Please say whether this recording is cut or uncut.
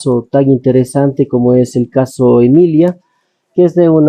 uncut